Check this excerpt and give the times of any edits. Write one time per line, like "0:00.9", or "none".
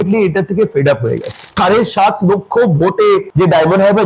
0:01.5